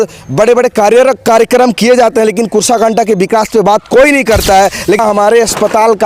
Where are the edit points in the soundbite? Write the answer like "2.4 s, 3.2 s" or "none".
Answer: 5.0 s